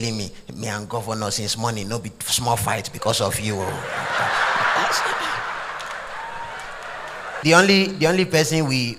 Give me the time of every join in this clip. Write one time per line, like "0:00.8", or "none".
0:07.4